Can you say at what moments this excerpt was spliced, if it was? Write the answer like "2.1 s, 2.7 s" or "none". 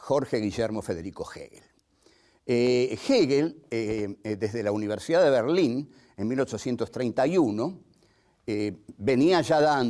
none

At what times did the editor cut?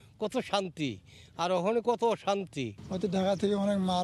none

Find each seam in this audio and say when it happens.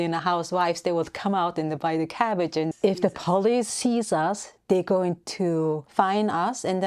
2.7 s, 5.9 s

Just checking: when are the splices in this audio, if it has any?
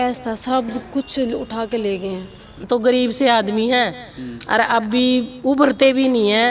2.6 s

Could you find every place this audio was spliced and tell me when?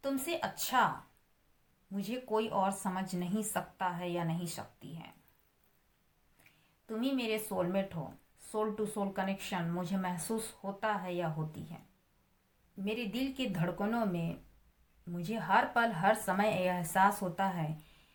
none

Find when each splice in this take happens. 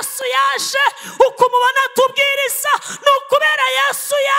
none

